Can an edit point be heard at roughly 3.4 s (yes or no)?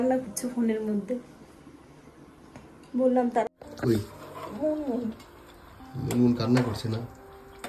yes